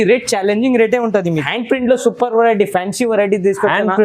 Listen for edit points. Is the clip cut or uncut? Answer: cut